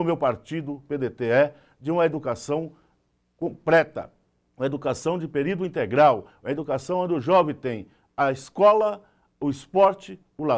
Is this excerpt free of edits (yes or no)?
yes